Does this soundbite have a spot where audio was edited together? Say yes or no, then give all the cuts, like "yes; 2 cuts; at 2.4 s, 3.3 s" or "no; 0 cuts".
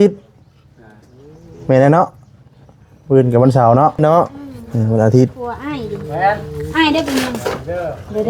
yes; 1 cut; at 5.5 s